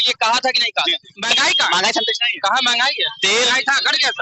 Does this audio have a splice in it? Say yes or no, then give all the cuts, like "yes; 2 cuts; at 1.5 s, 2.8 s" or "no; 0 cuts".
yes; 1 cut; at 1.2 s